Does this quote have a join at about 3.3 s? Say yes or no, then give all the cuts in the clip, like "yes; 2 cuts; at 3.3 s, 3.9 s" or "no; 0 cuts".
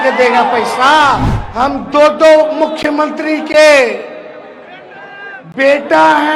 no; 1 cut; at 1.4 s